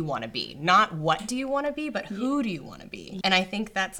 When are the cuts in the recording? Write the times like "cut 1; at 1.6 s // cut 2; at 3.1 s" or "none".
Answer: cut 1; at 3.1 s

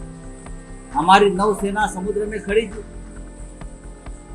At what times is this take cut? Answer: cut 1; at 0.9 s

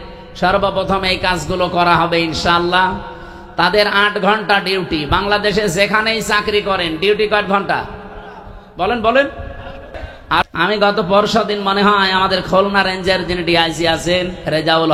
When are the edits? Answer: cut 1; at 10.4 s

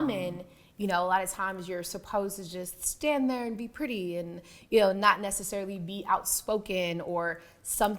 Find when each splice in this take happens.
none

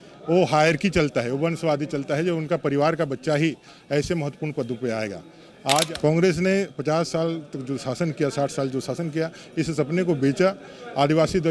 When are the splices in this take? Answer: cut 1; at 5.9 s

